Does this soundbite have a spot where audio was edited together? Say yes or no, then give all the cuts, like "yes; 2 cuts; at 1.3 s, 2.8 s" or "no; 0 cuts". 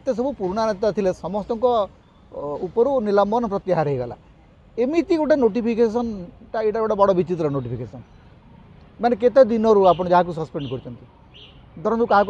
no; 0 cuts